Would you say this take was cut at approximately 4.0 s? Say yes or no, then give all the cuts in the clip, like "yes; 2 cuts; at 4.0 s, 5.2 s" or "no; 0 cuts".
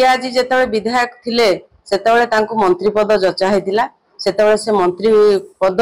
no; 0 cuts